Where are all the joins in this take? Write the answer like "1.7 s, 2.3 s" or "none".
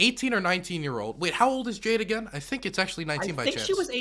none